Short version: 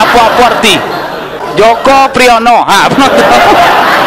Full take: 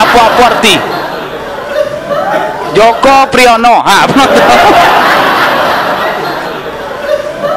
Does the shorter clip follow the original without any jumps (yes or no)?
no